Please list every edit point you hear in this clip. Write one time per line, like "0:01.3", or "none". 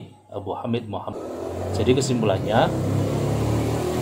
0:01.1